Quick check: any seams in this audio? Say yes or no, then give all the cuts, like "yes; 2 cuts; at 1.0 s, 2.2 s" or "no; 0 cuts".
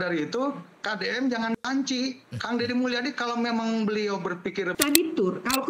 yes; 2 cuts; at 3.5 s, 4.7 s